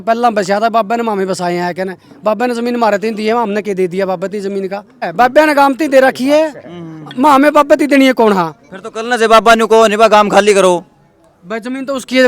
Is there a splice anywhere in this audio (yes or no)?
yes